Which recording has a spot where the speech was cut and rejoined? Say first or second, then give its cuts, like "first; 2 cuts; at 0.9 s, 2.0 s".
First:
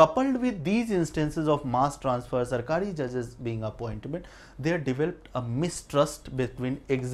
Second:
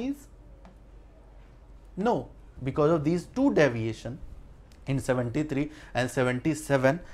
second; 1 cut; at 2.5 s